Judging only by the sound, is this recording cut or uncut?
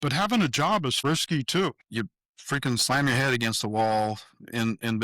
cut